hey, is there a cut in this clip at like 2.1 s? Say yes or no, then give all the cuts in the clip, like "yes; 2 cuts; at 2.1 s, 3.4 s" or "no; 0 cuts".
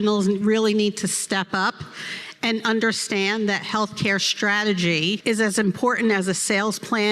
no; 1 cut; at 5.2 s